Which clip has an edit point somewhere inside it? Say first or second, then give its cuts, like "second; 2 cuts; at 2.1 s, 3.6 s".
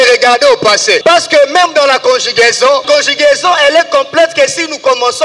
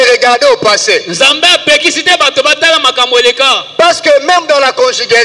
first; 2 cuts; at 1.0 s, 2.8 s